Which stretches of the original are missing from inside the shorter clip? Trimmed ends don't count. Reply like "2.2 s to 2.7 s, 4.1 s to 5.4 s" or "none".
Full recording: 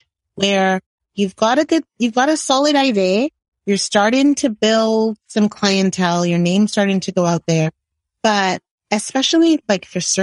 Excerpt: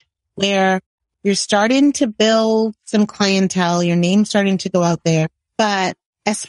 1.0 s to 3.4 s, 7.8 s to 8.1 s